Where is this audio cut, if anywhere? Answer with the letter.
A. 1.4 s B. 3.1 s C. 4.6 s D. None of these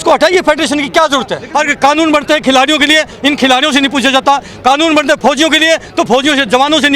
A